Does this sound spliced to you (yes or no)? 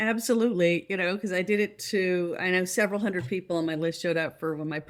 no